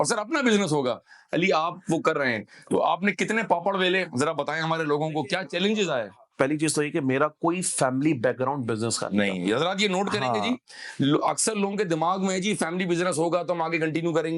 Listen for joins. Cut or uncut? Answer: uncut